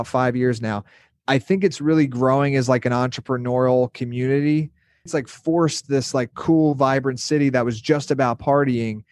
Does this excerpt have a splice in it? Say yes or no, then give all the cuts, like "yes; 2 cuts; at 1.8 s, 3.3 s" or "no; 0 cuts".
yes; 1 cut; at 5.1 s